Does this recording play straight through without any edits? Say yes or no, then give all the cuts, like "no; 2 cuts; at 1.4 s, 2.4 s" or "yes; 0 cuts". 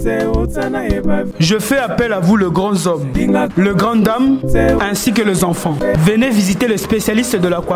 no; 1 cut; at 1.2 s